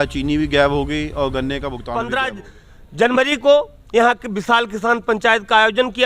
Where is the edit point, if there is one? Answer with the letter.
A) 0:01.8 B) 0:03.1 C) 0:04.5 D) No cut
A